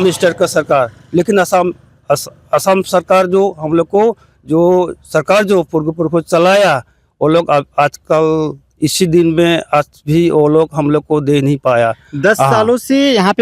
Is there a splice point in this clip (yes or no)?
no